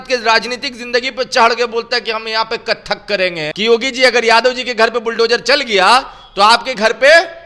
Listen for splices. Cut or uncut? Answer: cut